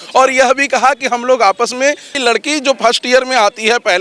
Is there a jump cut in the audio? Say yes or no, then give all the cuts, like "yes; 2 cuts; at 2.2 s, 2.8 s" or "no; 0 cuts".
yes; 1 cut; at 2.2 s